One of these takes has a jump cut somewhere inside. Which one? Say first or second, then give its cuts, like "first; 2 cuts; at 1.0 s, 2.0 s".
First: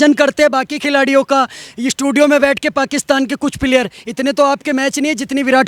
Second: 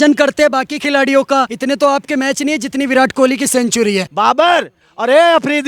second; 2 cuts; at 1.5 s, 4.1 s